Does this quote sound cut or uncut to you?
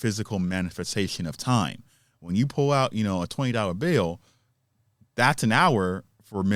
uncut